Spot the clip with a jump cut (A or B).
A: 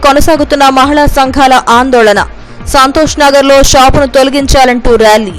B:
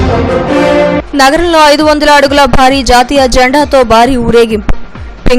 B